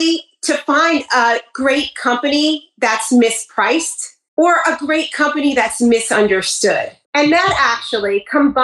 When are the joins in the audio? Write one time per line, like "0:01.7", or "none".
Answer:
none